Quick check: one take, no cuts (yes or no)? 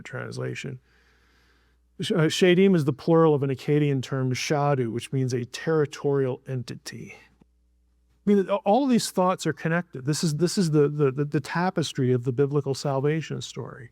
no